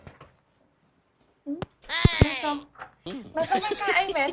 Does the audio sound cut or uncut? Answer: uncut